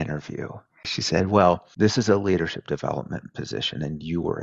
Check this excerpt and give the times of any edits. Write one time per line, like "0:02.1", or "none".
0:00.9
0:01.7